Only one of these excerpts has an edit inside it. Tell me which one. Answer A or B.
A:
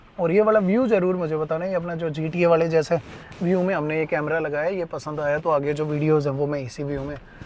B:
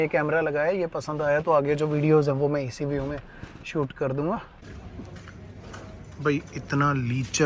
B